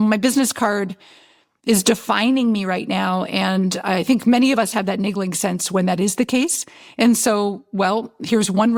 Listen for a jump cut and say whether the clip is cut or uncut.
uncut